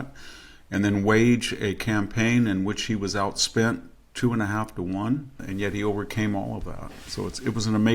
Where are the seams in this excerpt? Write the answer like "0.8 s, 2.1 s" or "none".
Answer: 5.4 s